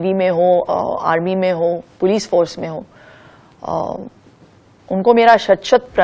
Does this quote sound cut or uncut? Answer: uncut